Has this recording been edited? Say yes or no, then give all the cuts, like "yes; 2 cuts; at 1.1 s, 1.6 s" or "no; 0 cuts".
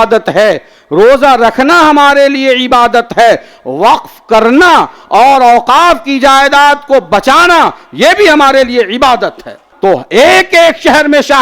yes; 1 cut; at 9.6 s